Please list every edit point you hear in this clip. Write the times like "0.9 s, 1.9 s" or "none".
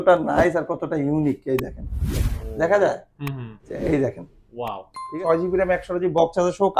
5.2 s